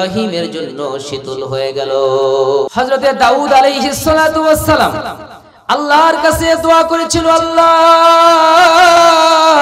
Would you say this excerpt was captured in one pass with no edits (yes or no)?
no